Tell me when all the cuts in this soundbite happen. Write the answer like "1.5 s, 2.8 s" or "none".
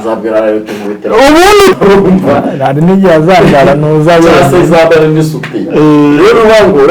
1.8 s